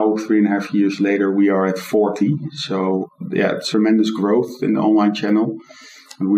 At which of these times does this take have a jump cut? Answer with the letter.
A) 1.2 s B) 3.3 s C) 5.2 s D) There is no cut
B